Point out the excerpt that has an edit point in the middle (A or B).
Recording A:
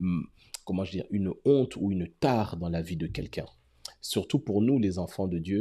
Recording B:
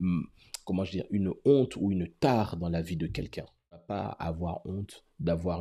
B